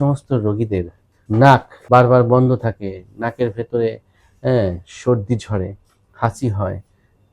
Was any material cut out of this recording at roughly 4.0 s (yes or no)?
no